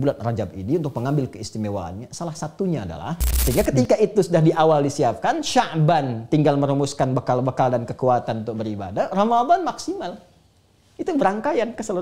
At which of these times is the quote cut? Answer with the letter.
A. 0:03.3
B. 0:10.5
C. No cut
A